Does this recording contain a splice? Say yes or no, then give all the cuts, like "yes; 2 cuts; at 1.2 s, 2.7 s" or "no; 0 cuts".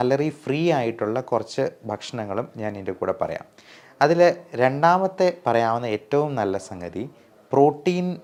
no; 0 cuts